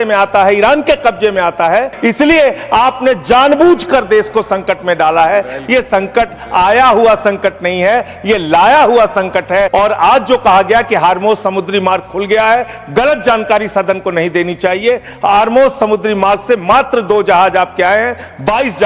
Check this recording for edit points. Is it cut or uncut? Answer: cut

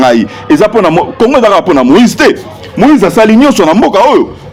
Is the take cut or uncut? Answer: uncut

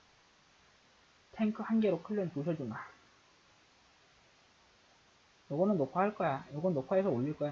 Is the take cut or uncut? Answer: uncut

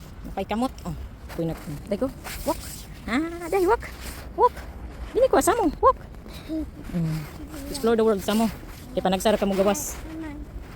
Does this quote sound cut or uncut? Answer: cut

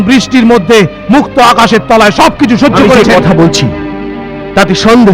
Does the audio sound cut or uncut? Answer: cut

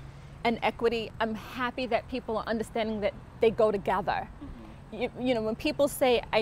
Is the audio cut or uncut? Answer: cut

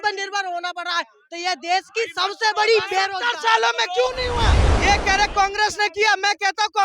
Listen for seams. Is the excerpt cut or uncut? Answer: cut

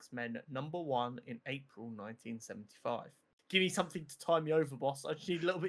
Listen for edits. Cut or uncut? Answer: cut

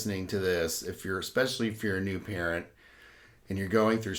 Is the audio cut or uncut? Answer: uncut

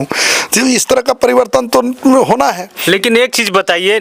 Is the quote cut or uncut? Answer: uncut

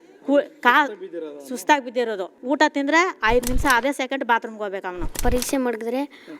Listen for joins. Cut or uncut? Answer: cut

